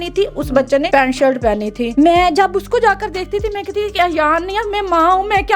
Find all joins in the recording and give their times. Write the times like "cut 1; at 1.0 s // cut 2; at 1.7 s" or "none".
cut 1; at 0.9 s // cut 2; at 1.9 s

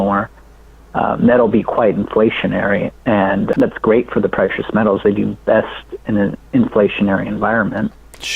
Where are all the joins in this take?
cut 1; at 3.5 s

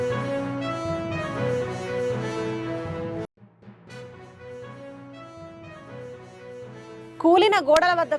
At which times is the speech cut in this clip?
cut 1; at 5.8 s

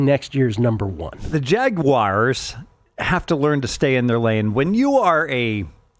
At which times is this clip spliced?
cut 1; at 1.2 s

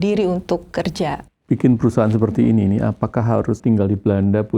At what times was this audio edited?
cut 1; at 1.2 s // cut 2; at 3.6 s

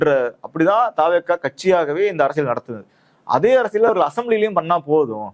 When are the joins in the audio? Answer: none

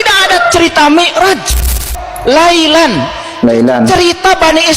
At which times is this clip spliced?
cut 1; at 1.7 s

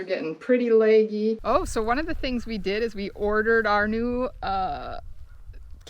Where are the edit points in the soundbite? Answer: cut 1; at 1.4 s

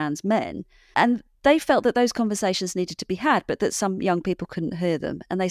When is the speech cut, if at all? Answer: none

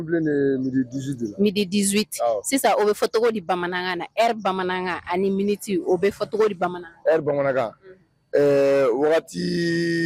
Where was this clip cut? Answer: none

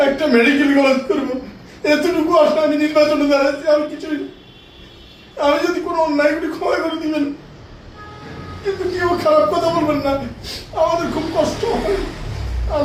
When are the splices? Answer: none

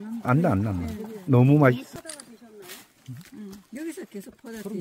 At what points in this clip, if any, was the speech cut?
cut 1; at 1.9 s

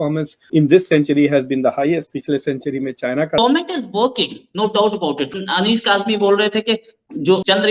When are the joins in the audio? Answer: cut 1; at 3.4 s

